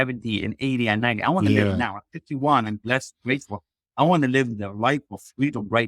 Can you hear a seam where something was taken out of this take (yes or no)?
no